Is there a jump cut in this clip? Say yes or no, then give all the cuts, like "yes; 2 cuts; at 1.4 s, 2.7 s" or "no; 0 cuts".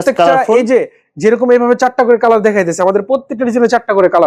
no; 0 cuts